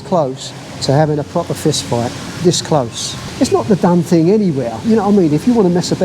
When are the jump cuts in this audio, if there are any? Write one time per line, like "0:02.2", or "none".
0:03.3